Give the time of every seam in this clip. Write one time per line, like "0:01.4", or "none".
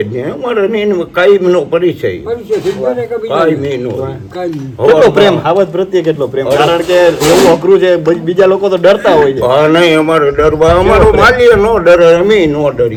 none